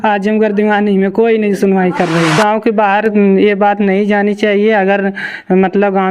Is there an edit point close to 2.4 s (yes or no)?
yes